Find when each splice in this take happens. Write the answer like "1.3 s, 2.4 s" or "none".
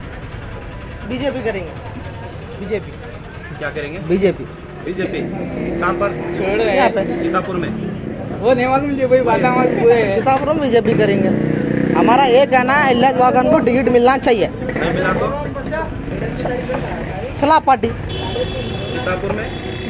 none